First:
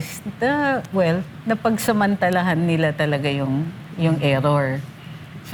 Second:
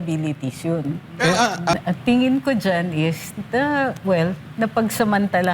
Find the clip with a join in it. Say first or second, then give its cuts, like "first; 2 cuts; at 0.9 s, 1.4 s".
second; 1 cut; at 1.7 s